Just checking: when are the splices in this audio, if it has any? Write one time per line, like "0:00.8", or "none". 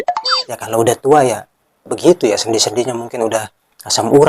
none